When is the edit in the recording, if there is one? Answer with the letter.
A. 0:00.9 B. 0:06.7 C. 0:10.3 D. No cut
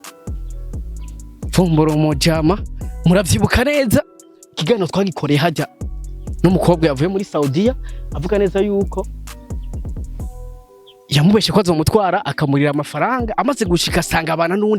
A